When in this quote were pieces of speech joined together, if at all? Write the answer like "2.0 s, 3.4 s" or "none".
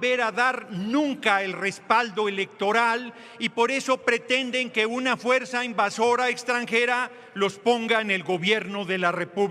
none

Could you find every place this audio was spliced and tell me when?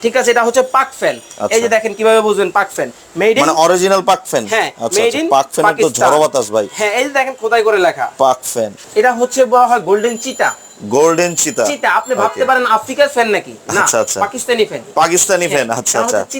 8.8 s

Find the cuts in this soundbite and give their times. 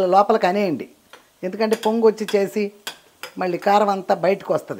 none

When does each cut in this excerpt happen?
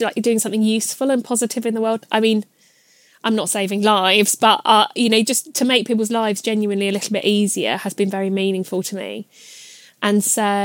none

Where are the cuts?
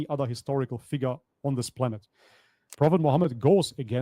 2.7 s

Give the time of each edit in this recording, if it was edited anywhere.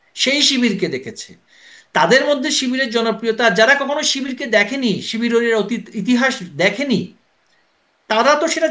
none

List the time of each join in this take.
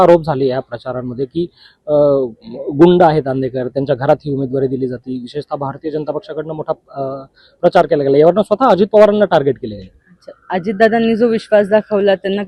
none

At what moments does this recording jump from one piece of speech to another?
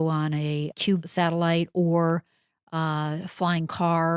1.0 s

